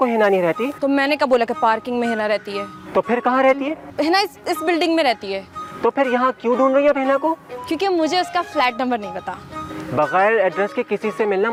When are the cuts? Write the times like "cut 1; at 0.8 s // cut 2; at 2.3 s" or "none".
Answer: none